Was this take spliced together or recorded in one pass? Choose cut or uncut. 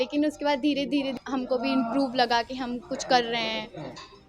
cut